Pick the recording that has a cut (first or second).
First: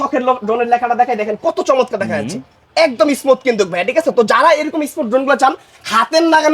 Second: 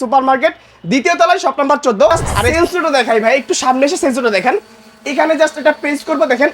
second